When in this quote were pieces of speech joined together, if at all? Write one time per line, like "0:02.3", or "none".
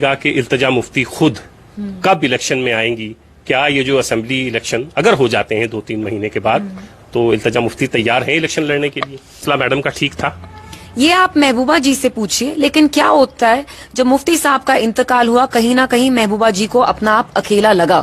0:09.4